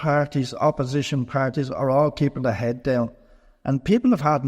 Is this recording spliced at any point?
no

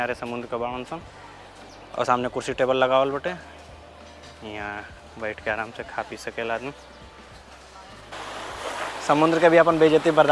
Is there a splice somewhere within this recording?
yes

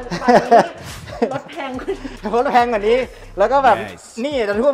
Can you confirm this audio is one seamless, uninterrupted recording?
yes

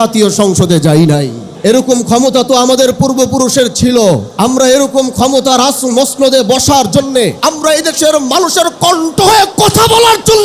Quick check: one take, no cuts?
no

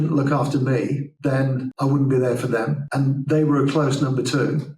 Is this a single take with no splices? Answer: no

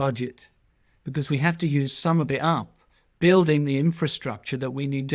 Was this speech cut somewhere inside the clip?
no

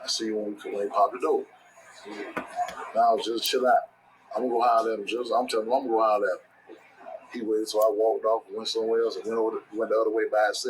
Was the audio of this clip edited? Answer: yes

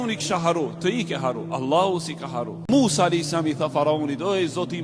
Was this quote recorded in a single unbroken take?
no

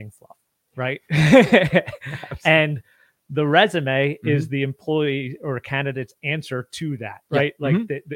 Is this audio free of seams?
yes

